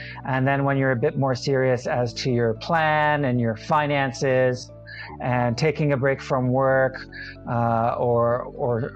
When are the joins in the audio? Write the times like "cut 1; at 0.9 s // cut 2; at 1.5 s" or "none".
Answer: none